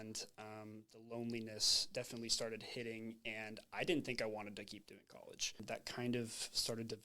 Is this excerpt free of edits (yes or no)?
no